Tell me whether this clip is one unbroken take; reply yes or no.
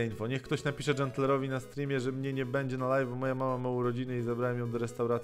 yes